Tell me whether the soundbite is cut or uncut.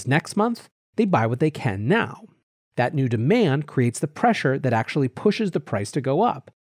uncut